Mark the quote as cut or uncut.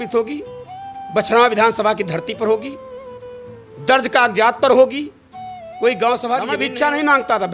cut